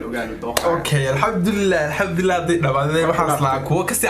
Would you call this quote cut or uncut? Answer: uncut